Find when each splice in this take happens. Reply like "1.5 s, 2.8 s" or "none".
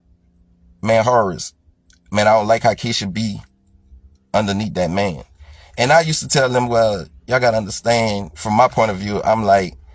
none